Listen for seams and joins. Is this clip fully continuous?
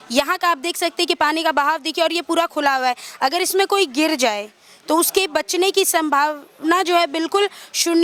yes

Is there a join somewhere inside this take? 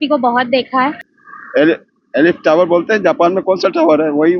yes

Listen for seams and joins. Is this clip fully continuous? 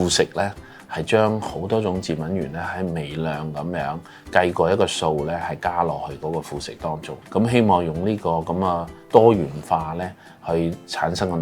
yes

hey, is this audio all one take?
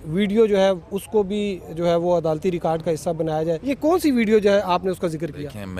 no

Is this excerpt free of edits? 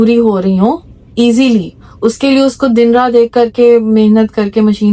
yes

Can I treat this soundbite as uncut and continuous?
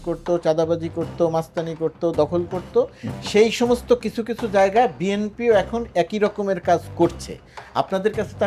yes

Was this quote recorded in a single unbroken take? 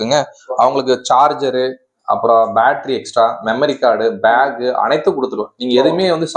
yes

